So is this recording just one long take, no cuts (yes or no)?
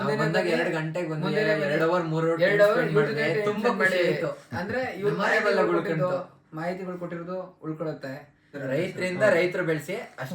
no